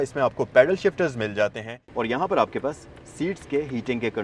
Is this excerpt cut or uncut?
cut